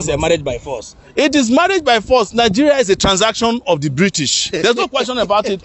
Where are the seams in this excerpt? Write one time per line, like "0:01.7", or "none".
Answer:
none